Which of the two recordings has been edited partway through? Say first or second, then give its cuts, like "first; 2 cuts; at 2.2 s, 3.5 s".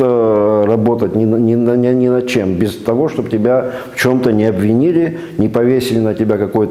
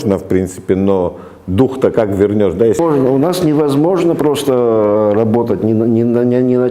second; 1 cut; at 2.8 s